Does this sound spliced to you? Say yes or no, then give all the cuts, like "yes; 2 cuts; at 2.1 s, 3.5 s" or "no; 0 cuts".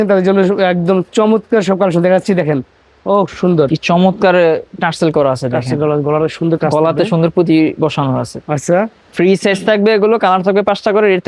no; 0 cuts